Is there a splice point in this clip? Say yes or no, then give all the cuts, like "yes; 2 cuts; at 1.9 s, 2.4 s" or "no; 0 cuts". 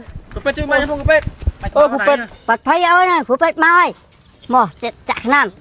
yes; 1 cut; at 2.3 s